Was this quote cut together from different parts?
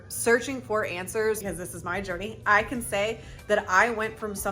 yes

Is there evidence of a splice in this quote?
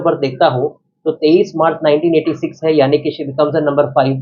no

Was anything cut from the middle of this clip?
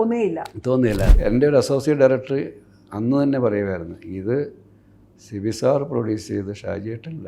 yes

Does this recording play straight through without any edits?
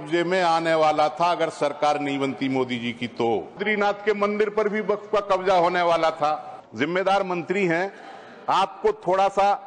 no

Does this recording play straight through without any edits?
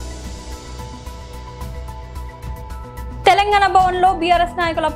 yes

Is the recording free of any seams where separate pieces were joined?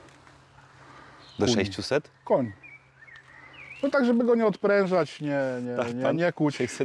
yes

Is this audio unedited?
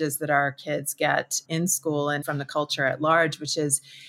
no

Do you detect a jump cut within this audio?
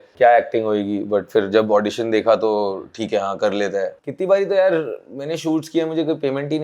yes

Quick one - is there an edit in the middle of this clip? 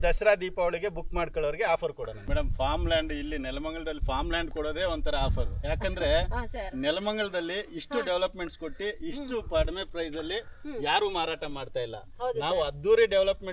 yes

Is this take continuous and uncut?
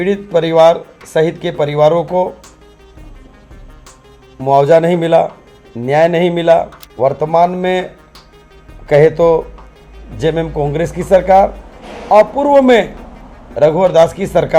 no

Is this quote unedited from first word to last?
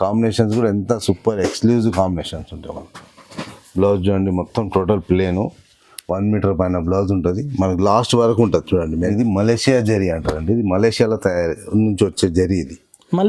no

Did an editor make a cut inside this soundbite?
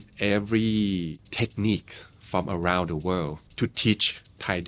yes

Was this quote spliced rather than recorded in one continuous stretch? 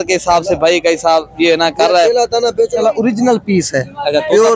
no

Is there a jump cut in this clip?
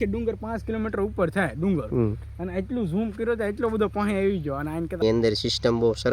yes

